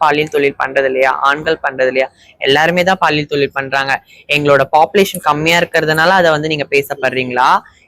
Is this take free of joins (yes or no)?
yes